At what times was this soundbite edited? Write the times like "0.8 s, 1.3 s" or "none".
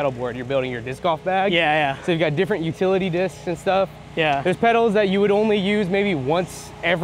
none

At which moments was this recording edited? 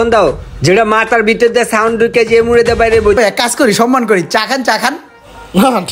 3.2 s

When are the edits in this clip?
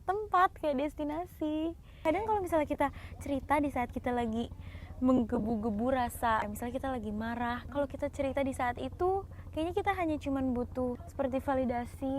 1.9 s, 6.4 s, 7.6 s, 11.0 s

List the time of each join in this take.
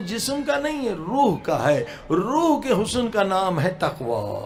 none

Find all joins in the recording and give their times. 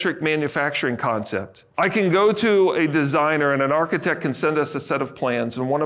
1.6 s

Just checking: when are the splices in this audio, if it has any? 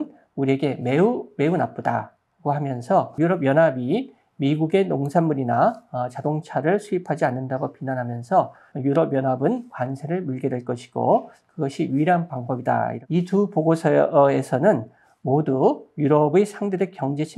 3.2 s, 8.6 s, 13.0 s

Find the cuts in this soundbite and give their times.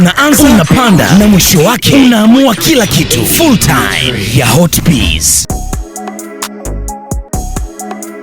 5.4 s, 7.2 s

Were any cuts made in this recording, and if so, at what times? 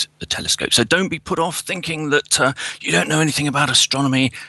3.4 s

